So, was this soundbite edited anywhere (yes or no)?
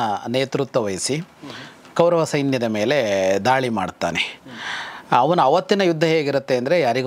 no